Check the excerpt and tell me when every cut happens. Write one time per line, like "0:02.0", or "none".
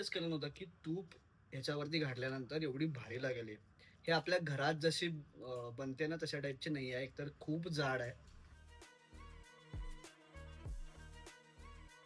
none